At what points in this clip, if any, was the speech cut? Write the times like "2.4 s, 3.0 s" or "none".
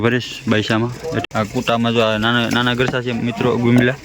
1.2 s